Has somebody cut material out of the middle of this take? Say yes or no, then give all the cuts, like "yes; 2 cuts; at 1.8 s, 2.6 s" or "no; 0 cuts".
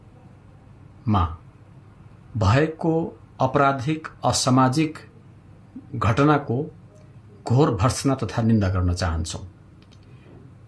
no; 0 cuts